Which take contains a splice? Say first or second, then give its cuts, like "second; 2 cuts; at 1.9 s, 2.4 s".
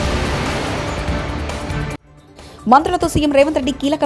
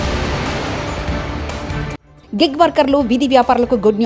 first; 1 cut; at 2.1 s